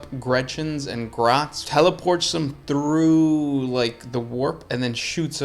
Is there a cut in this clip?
yes; 1 cut; at 1.6 s

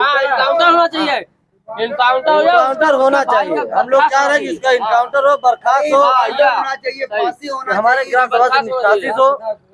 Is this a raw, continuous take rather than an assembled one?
yes; 0 cuts

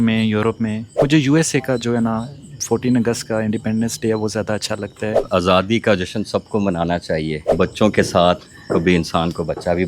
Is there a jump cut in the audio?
yes; 3 cuts; at 1.0 s, 5.1 s, 7.5 s

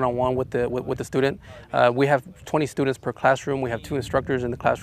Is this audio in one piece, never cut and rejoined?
yes; 0 cuts

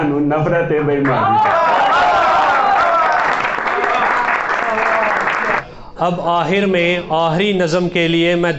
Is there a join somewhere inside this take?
yes; 1 cut; at 5.5 s

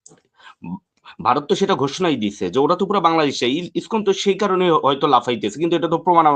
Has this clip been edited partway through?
no; 0 cuts

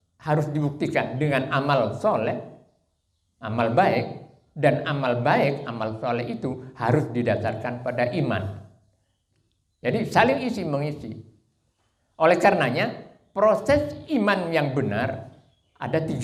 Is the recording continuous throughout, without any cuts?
yes; 0 cuts

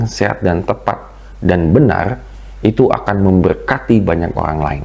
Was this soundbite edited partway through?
no; 0 cuts

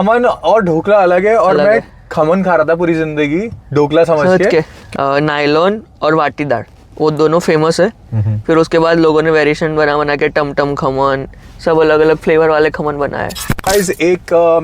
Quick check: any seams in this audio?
yes; 2 cuts; at 4.8 s, 13.7 s

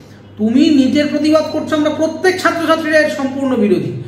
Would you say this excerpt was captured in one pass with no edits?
yes; 0 cuts

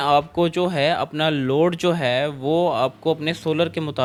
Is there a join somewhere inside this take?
no; 0 cuts

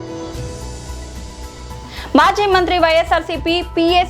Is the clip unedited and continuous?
no; 1 cut; at 2.0 s

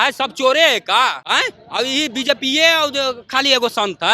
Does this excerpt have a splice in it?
yes; 1 cut; at 1.2 s

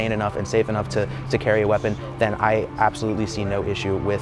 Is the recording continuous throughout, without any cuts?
yes; 0 cuts

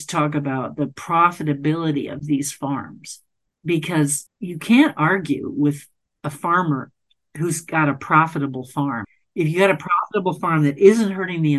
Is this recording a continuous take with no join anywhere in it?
no; 2 cuts; at 4.3 s, 9.1 s

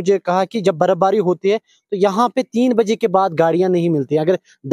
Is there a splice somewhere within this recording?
no; 0 cuts

